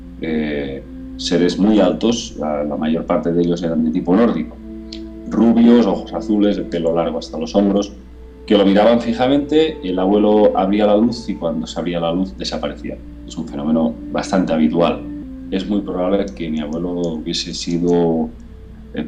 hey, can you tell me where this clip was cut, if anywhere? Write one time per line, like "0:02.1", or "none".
0:15.2